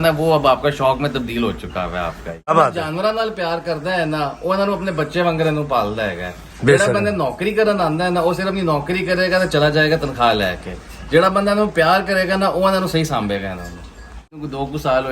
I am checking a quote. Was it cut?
yes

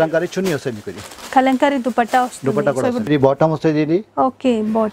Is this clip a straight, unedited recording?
no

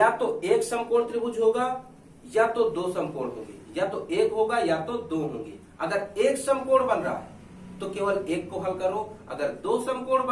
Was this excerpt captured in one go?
yes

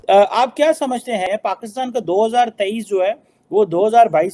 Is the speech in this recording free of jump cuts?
no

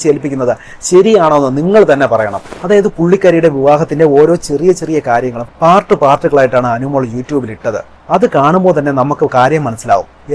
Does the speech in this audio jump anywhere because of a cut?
yes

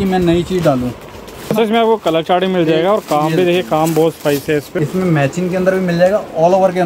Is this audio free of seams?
no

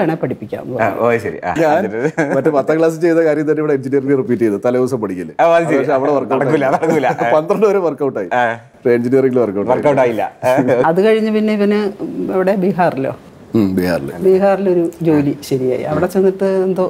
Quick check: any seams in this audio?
yes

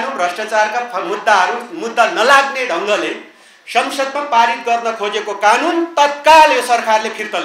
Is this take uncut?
yes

